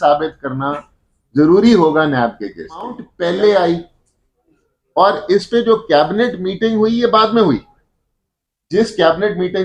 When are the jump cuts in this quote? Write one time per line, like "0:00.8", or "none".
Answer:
0:03.1